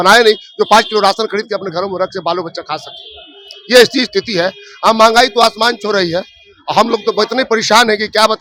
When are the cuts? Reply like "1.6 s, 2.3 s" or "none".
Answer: none